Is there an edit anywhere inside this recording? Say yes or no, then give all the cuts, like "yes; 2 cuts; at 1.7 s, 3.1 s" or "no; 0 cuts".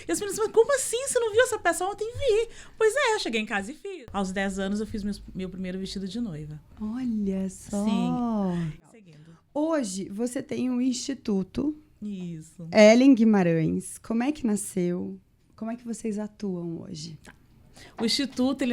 yes; 2 cuts; at 3.6 s, 8.8 s